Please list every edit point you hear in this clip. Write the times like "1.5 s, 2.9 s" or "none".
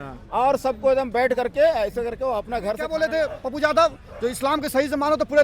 2.9 s